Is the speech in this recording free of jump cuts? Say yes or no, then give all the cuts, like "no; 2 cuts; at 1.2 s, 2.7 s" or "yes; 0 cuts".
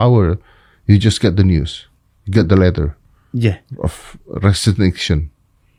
yes; 0 cuts